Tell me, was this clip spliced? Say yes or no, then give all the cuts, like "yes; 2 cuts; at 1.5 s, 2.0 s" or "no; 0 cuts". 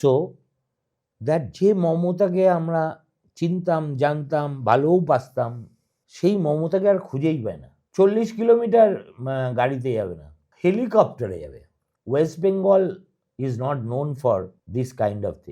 yes; 1 cut; at 14.6 s